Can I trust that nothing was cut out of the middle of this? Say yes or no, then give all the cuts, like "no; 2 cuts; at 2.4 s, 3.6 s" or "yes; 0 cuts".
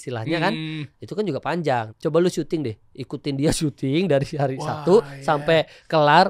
no; 1 cut; at 1.9 s